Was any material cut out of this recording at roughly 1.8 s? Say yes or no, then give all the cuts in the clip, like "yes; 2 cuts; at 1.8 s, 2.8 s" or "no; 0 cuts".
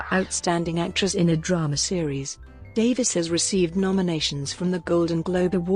no; 1 cut; at 3.2 s